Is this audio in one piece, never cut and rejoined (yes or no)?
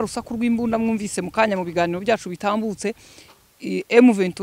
yes